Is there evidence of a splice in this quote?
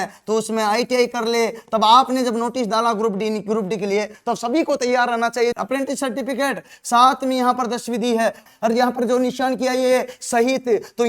yes; 2 cuts; at 5.5 s, 8.5 s

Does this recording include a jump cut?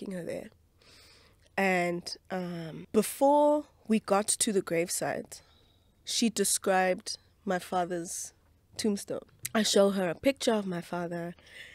yes; 2 cuts; at 2.7 s, 9.3 s

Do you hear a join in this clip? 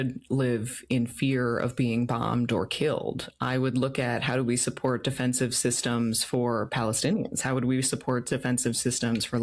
no; 0 cuts

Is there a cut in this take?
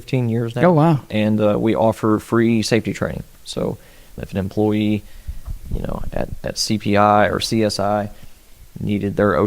yes; 1 cut; at 4.2 s

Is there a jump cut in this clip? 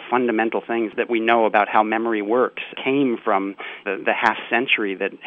yes; 2 cuts; at 0.9 s, 2.7 s

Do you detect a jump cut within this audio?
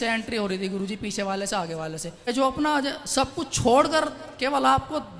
yes; 1 cut; at 2.1 s

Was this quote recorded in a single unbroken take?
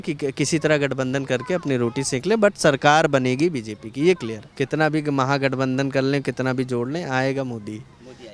no; 1 cut; at 4.4 s

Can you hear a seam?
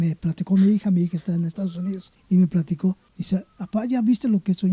yes; 2 cuts; at 2.1 s, 3.1 s

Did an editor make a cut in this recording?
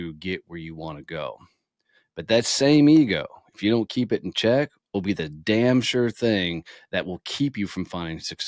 no; 0 cuts

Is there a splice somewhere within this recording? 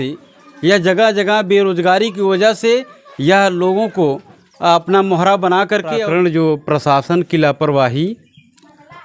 yes; 1 cut; at 6.0 s

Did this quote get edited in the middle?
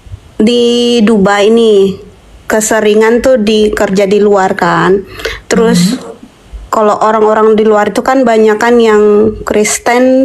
no; 0 cuts

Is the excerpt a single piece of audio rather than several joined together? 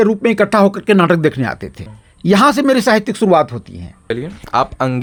yes; 0 cuts

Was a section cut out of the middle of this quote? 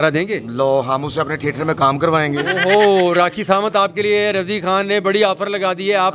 no; 0 cuts

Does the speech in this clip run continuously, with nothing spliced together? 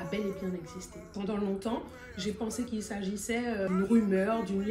no; 1 cut; at 3.7 s

